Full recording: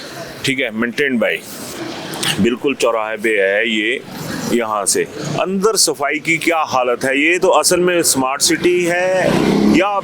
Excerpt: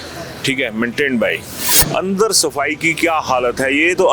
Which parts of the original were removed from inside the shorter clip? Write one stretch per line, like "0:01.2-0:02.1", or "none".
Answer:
0:01.7-0:05.2